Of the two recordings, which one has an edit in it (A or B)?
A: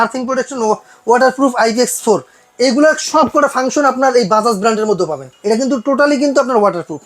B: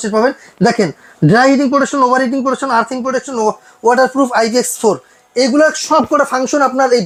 A